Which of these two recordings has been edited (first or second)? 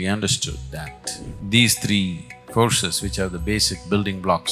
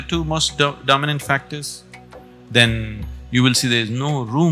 first